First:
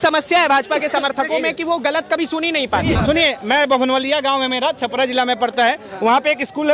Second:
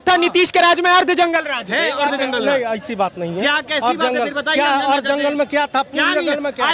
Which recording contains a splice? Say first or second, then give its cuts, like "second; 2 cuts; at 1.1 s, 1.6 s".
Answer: first; 1 cut; at 2.9 s